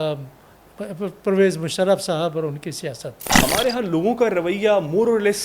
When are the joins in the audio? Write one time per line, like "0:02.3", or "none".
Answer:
0:03.2